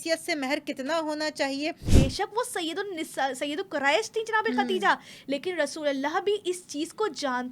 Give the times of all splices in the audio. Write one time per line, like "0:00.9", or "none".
0:01.9